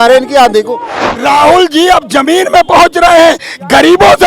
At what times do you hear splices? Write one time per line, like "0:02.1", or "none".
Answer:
0:01.0